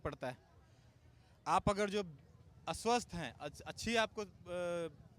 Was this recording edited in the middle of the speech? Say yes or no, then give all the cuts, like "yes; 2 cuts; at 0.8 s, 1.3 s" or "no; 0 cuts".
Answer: no; 0 cuts